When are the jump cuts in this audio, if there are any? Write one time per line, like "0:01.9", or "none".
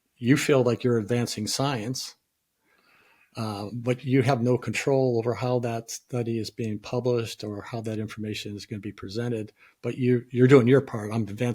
none